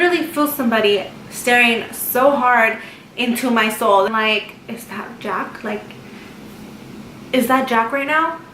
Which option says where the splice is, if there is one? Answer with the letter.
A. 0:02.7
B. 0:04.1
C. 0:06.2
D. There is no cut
B